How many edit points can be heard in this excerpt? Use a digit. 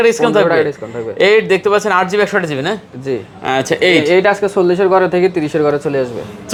0